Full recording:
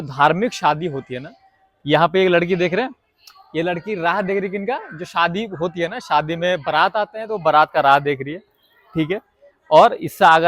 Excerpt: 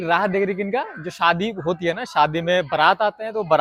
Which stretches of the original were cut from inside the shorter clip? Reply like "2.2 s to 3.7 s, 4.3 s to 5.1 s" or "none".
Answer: none